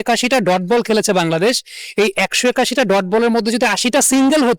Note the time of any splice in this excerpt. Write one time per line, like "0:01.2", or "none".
none